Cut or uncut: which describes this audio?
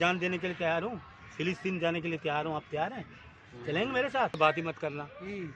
cut